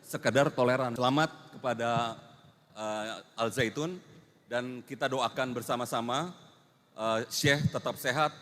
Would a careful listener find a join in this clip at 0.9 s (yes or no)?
yes